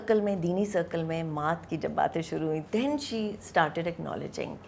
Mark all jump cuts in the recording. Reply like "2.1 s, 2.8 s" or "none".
2.6 s